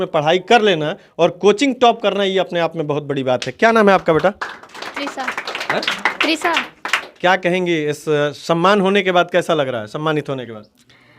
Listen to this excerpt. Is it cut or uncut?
uncut